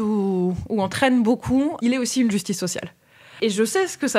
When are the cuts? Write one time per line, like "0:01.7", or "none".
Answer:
0:01.8
0:03.3